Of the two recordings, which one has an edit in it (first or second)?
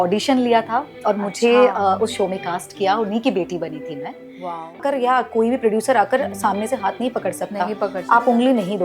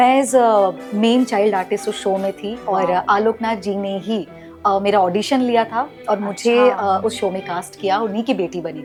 first